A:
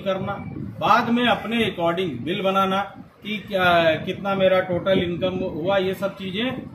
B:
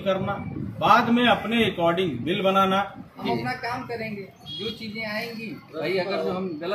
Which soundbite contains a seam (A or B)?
B